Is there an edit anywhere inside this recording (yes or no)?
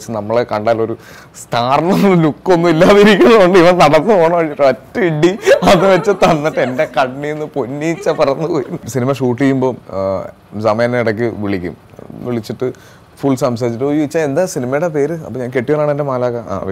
yes